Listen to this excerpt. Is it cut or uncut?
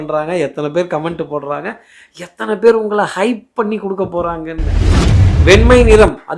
cut